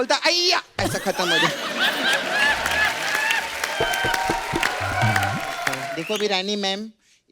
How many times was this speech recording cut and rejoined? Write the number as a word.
one